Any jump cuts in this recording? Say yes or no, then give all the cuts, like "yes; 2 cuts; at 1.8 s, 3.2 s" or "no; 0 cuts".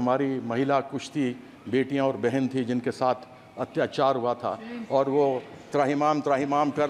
no; 0 cuts